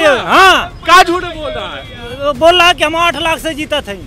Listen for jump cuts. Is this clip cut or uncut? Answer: uncut